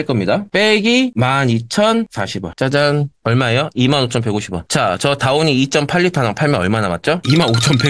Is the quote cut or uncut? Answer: uncut